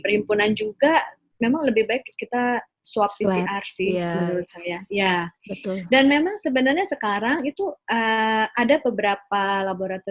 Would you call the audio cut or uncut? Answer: uncut